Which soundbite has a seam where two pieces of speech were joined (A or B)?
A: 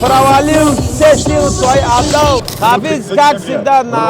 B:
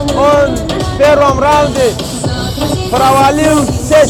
A